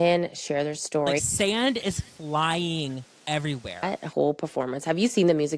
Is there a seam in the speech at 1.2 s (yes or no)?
yes